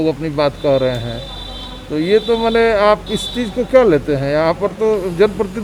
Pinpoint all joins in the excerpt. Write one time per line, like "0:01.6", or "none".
none